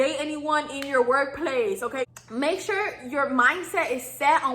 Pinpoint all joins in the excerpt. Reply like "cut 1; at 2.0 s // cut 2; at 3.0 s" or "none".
cut 1; at 2.1 s

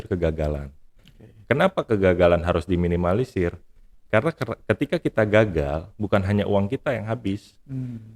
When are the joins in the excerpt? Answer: none

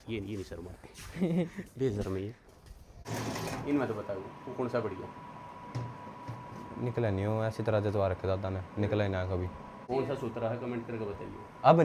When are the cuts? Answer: cut 1; at 2.9 s // cut 2; at 9.8 s

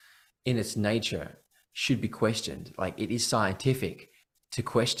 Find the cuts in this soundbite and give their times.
none

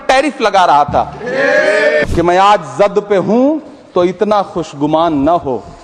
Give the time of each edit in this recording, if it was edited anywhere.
cut 1; at 2.0 s

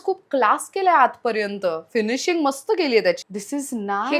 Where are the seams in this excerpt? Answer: cut 1; at 3.2 s

